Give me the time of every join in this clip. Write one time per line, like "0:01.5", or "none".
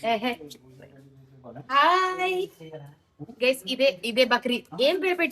none